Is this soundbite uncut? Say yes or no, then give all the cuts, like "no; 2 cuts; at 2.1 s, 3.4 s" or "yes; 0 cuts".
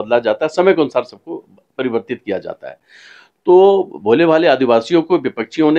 yes; 0 cuts